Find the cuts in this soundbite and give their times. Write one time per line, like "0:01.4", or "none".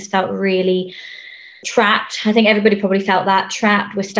0:01.5